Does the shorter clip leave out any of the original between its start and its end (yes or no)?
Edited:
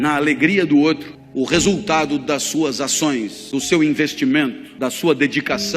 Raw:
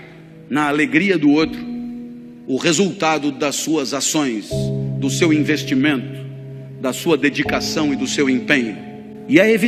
yes